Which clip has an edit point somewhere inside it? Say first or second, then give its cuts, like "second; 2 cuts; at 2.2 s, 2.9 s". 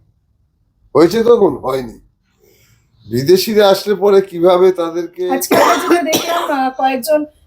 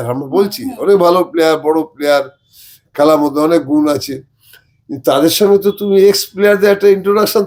first; 1 cut; at 5.1 s